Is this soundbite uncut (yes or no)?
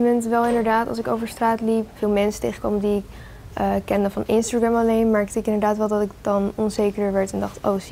no